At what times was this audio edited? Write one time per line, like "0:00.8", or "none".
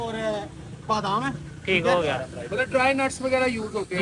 none